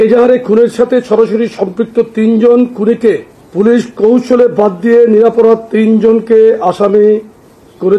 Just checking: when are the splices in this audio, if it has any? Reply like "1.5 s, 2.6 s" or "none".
none

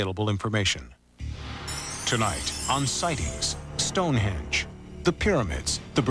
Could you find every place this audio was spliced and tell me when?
none

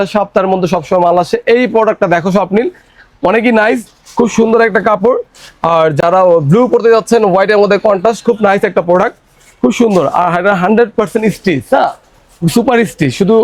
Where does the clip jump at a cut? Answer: none

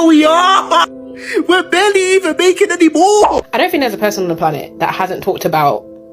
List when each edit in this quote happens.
none

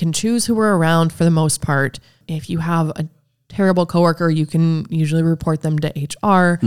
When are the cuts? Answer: 2.2 s

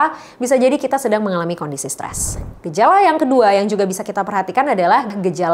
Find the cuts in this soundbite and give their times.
none

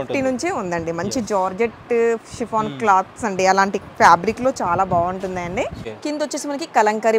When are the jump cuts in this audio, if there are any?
5.9 s

